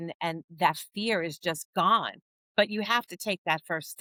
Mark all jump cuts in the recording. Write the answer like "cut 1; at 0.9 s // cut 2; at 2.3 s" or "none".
none

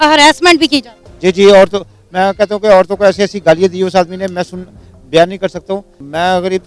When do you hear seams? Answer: none

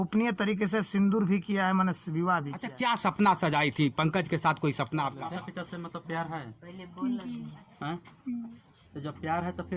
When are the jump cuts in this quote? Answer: cut 1; at 2.7 s // cut 2; at 5.3 s

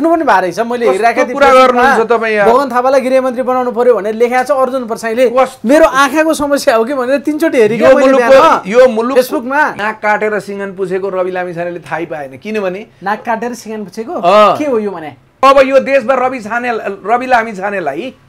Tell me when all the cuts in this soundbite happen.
cut 1; at 9.8 s // cut 2; at 15.4 s

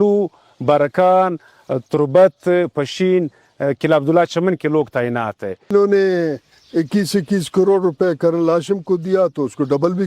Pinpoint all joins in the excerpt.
cut 1; at 5.7 s

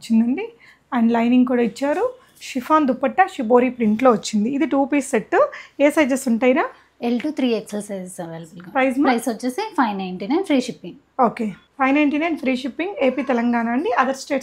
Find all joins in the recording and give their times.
none

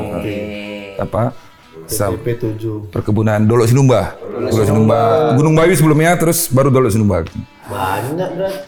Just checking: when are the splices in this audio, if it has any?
none

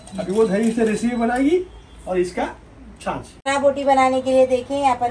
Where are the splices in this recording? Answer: cut 1; at 3.3 s

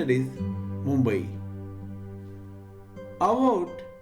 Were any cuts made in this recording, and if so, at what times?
cut 1; at 1.3 s // cut 2; at 3.0 s

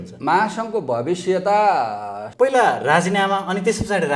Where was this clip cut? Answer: cut 1; at 2.2 s

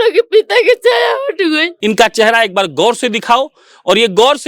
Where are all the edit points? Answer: cut 1; at 1.7 s

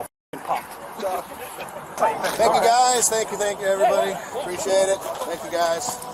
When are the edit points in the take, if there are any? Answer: cut 1; at 1.9 s

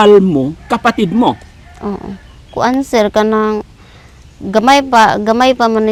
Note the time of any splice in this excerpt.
none

